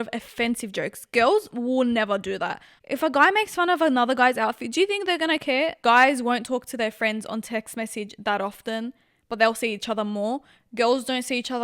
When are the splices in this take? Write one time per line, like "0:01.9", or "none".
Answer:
0:02.7
0:05.8